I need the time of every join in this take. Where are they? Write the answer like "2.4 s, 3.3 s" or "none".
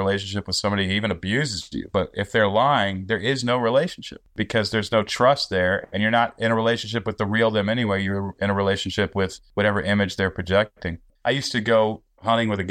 4.3 s, 9.4 s, 11.0 s